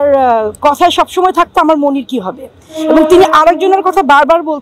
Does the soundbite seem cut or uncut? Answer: uncut